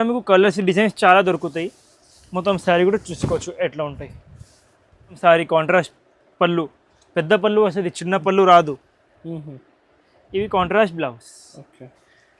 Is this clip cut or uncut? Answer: cut